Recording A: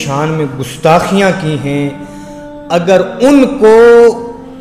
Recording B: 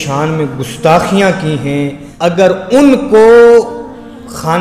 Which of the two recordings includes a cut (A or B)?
B